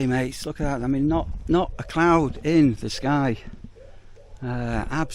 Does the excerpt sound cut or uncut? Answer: uncut